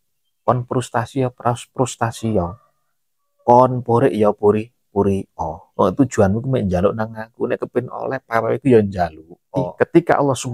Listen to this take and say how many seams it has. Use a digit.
1